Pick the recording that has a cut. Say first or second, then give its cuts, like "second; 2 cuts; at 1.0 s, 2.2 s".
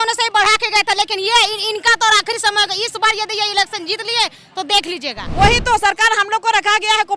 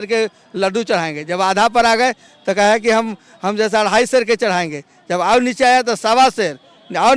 first; 1 cut; at 5.2 s